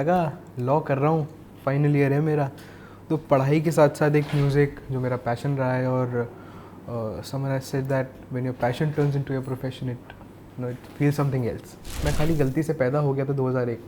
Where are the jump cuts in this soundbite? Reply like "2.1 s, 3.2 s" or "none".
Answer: 11.9 s